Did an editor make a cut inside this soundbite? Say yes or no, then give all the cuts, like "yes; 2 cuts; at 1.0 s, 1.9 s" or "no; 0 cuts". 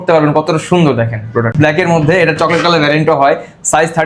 no; 0 cuts